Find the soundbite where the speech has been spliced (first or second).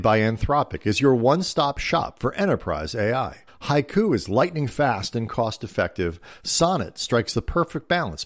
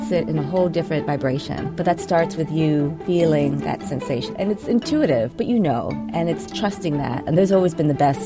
second